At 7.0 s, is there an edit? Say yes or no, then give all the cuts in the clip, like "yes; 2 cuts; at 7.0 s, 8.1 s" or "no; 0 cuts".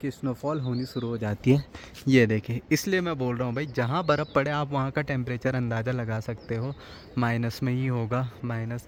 no; 0 cuts